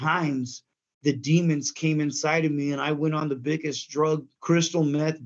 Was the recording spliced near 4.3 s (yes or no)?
yes